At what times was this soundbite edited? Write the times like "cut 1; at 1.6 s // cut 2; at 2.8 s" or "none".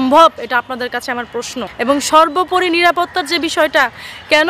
cut 1; at 1.6 s